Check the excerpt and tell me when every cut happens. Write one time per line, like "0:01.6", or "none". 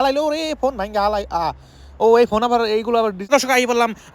0:03.2